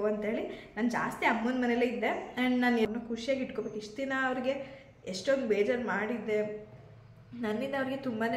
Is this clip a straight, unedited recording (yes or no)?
no